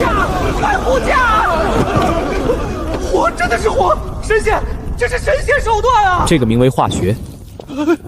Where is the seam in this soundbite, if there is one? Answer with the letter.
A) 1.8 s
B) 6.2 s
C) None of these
B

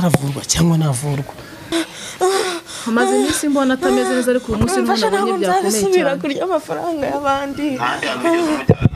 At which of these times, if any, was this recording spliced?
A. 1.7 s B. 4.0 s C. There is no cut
A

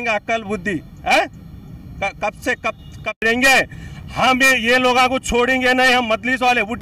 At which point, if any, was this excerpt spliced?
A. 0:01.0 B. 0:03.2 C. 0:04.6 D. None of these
B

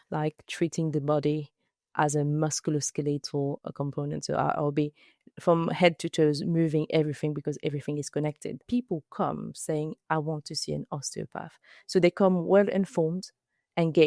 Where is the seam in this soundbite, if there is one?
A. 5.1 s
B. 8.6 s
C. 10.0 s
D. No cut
B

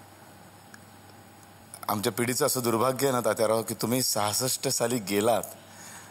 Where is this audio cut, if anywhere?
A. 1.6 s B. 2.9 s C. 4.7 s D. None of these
A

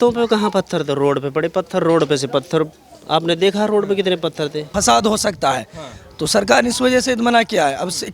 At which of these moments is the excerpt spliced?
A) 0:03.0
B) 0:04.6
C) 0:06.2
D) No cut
B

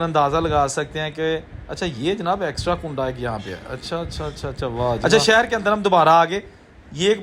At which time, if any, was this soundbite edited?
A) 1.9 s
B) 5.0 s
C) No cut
B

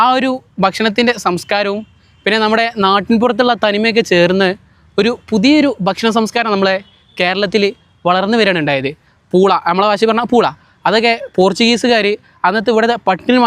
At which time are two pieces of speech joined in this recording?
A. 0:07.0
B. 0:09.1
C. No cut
B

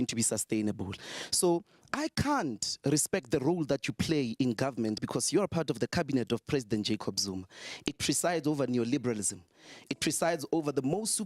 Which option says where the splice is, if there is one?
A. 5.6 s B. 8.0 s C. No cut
A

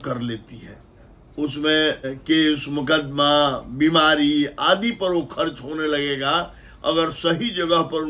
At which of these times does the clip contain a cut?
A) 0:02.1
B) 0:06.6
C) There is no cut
A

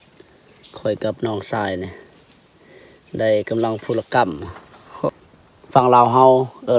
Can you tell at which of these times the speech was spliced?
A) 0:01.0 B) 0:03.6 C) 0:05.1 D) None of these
C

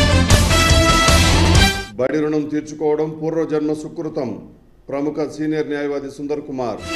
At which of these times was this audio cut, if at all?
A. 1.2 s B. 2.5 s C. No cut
A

